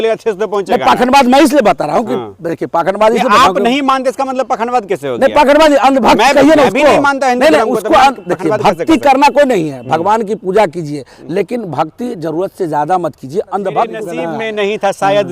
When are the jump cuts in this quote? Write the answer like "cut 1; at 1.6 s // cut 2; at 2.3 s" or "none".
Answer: cut 1; at 14.2 s